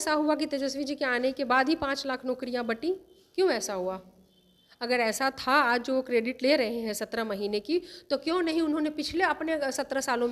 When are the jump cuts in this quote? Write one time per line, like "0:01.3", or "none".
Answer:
none